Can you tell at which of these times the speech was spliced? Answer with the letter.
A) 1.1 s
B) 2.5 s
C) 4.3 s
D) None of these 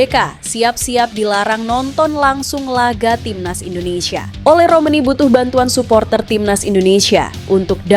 C